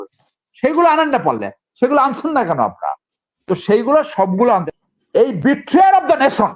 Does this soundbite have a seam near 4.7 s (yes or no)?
yes